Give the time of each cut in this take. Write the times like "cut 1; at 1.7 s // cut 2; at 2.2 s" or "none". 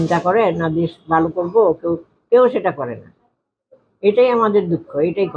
none